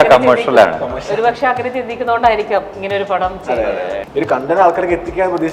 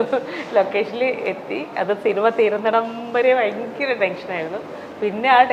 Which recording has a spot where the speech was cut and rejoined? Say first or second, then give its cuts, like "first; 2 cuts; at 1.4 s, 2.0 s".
first; 1 cut; at 4.0 s